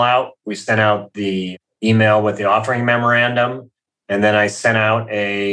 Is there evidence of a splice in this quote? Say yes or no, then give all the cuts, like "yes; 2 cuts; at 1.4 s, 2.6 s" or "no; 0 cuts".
no; 0 cuts